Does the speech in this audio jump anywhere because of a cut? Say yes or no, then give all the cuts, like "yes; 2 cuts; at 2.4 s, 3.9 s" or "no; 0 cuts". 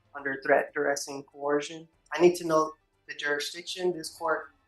yes; 1 cut; at 2.0 s